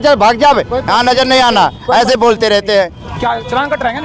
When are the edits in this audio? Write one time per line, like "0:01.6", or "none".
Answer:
0:03.0

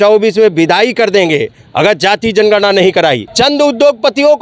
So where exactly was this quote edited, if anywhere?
0:03.3

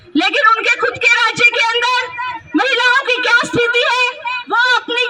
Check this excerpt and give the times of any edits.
none

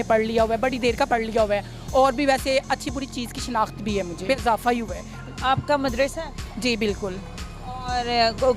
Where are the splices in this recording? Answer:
0:04.3

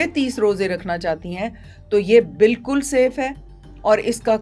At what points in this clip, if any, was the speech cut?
none

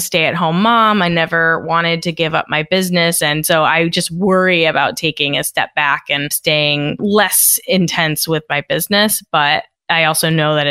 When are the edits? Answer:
0:09.8

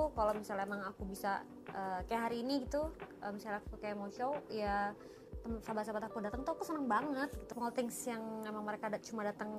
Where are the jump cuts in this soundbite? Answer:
0:07.4

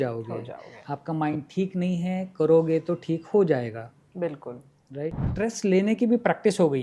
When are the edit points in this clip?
0:05.2

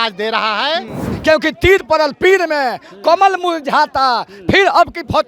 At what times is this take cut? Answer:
0:01.0

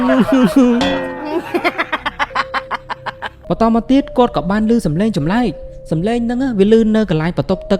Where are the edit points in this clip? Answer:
0:03.4

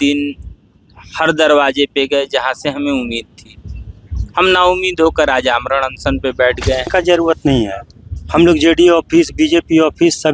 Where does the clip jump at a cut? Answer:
0:06.9

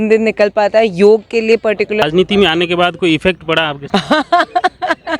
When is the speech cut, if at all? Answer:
0:02.0
0:03.8

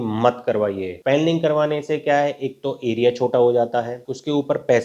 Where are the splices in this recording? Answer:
none

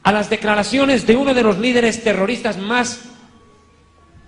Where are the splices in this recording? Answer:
0:01.8

